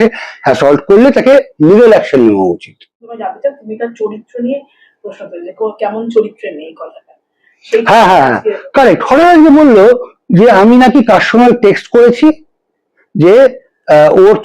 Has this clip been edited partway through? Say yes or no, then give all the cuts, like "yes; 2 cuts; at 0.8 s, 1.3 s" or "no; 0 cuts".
yes; 1 cut; at 3.2 s